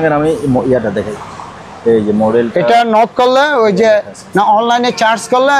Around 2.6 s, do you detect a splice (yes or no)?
no